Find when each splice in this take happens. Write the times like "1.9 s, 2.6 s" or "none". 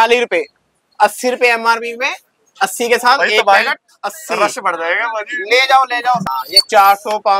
6.2 s